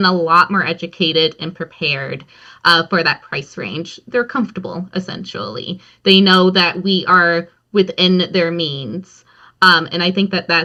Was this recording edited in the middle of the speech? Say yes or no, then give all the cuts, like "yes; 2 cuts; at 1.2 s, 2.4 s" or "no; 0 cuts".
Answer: no; 0 cuts